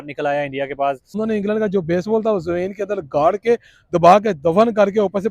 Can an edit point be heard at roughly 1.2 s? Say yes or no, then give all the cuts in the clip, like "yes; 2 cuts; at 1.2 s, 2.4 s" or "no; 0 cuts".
yes; 1 cut; at 1.2 s